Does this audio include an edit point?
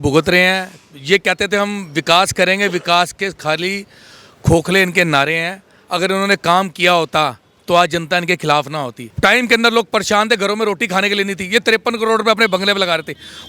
yes; 1 cut; at 9.0 s

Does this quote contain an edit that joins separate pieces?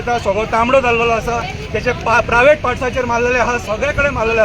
no; 0 cuts

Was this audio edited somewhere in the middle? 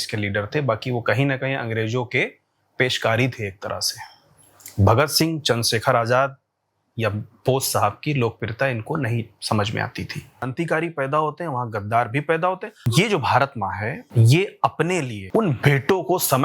yes; 4 cuts; at 10.5 s, 12.7 s, 14.0 s, 15.2 s

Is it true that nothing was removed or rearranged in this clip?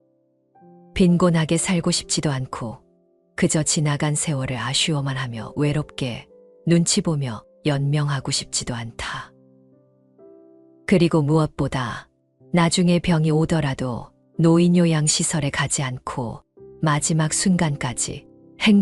no; 1 cut; at 0.9 s

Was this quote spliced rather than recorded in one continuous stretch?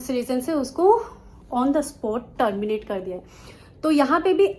no; 0 cuts

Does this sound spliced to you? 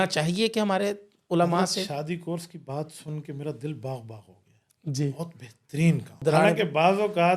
yes; 1 cut; at 6.2 s

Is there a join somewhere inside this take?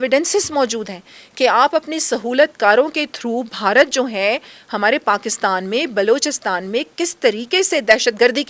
no; 0 cuts

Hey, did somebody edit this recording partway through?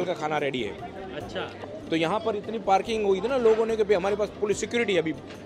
yes; 1 cut; at 1.5 s

